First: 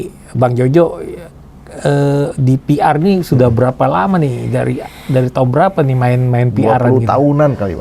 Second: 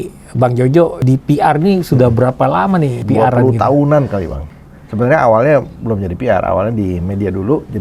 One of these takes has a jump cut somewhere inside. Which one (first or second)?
second